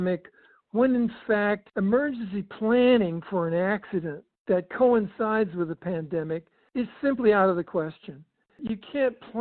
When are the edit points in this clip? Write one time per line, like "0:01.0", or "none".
0:01.7
0:08.5